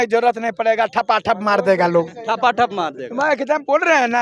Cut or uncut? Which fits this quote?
uncut